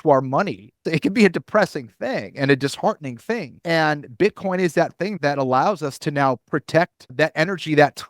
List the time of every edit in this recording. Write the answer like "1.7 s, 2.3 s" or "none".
0.9 s, 3.5 s, 5.1 s, 7.1 s